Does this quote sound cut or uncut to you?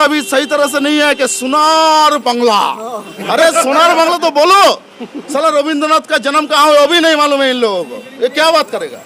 uncut